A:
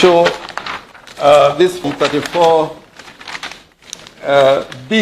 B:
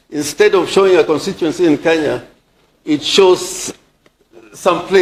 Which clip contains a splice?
A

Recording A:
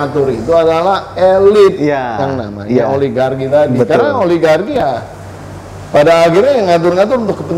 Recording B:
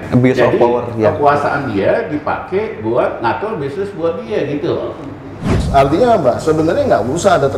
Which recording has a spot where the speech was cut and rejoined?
B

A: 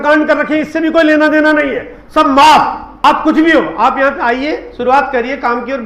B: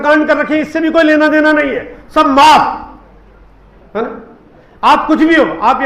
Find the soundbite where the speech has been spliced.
A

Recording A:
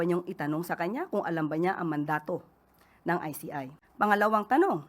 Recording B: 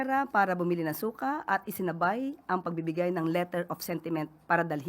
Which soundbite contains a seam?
A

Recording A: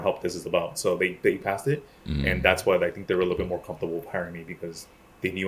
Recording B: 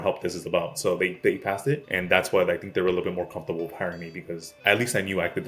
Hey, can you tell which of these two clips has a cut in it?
B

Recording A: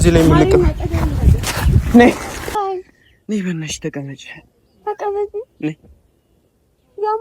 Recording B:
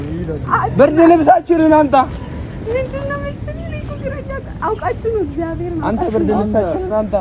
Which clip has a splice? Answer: A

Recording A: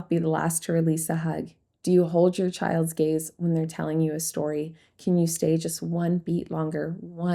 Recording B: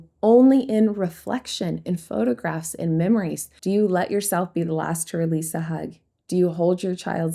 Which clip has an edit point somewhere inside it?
B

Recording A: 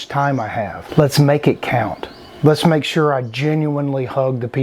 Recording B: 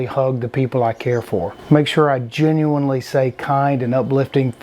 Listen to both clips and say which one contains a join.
B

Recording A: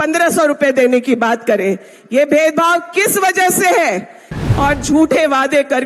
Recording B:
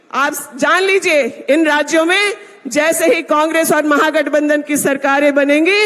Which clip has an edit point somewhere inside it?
A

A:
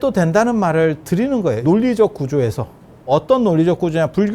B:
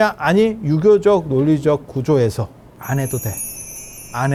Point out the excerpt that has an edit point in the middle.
A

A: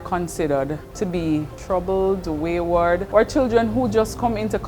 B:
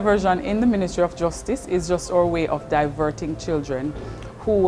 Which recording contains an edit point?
A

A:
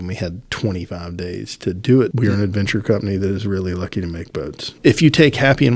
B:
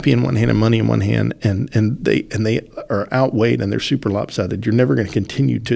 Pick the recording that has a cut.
A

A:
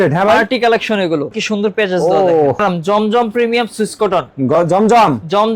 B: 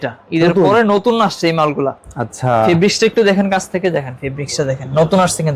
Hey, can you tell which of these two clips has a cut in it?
A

